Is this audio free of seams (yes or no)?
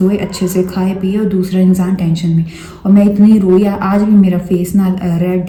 yes